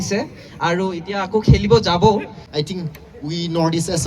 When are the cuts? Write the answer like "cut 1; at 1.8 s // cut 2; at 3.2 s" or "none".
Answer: cut 1; at 2.4 s

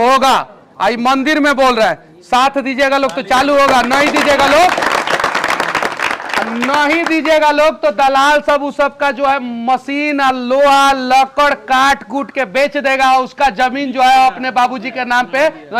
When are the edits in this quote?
none

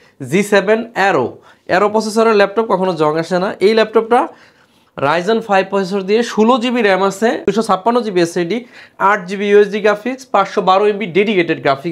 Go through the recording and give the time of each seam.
none

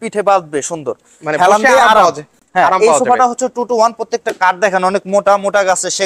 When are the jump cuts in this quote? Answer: none

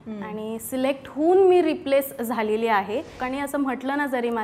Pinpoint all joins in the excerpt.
cut 1; at 3.2 s

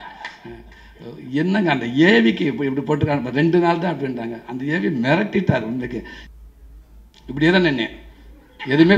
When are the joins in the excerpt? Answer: cut 1; at 6.2 s

